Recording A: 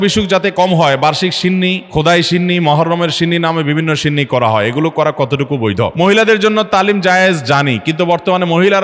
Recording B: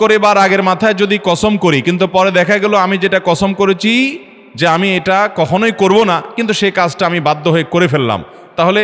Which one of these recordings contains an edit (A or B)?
A